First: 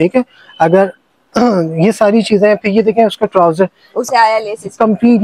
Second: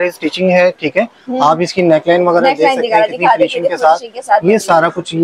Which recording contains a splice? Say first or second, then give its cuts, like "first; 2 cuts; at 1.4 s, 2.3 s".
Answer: first; 1 cut; at 4.0 s